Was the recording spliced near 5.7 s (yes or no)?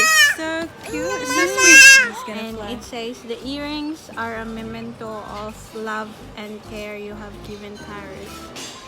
no